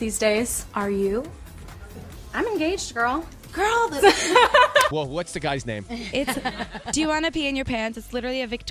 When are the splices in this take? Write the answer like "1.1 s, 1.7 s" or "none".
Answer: 4.9 s